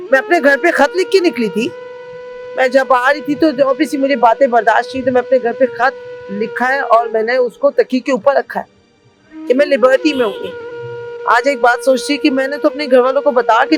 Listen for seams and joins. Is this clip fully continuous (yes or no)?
yes